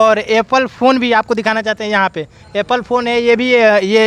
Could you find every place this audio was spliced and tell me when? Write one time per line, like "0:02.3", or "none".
none